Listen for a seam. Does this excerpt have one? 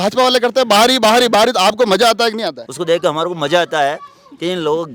yes; 1 cut; at 2.7 s

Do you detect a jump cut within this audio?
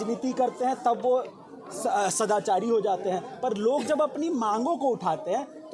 no; 0 cuts

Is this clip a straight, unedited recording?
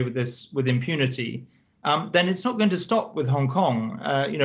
yes; 0 cuts

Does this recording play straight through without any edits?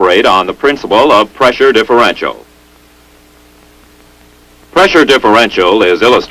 no; 1 cut; at 2.3 s

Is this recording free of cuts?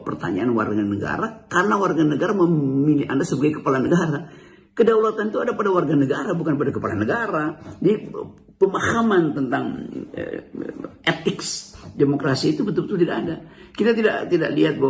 yes; 0 cuts

